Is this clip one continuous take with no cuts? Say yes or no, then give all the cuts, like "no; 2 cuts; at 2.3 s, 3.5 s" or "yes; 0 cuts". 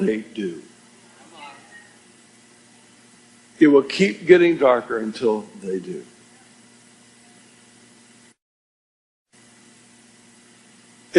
no; 1 cut; at 4.9 s